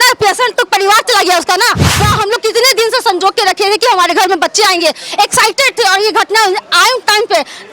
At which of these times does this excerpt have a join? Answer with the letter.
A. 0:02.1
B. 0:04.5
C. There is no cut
A